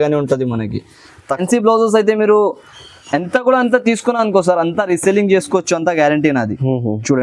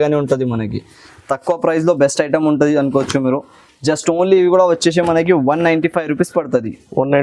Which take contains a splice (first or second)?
first